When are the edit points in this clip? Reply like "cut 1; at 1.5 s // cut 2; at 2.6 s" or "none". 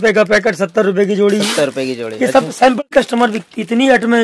cut 1; at 2.9 s

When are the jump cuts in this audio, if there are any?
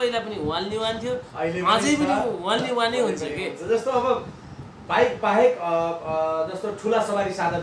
none

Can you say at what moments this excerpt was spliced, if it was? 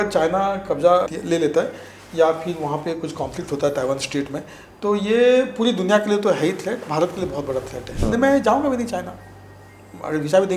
cut 1; at 1.1 s // cut 2; at 8.0 s

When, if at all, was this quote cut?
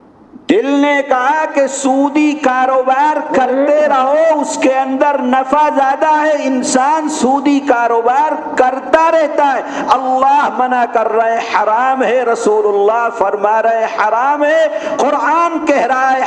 none

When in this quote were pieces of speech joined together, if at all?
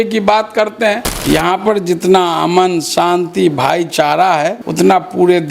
cut 1; at 1.1 s // cut 2; at 4.6 s

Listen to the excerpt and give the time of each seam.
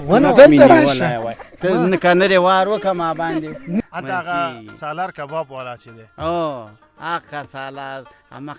cut 1; at 3.9 s

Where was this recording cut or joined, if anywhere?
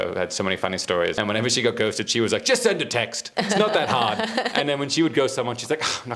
cut 1; at 1.2 s // cut 2; at 3.2 s

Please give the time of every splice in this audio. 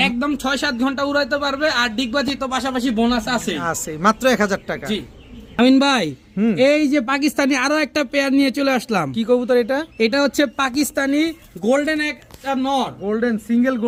none

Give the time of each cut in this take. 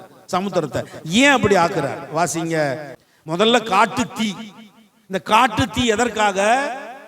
cut 1; at 2.9 s

